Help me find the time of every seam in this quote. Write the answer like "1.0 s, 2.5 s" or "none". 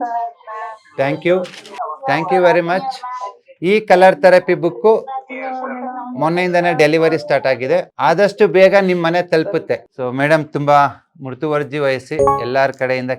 1.6 s, 7.9 s, 9.9 s